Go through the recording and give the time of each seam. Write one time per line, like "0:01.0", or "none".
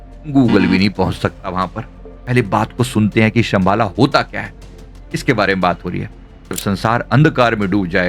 0:02.1
0:06.6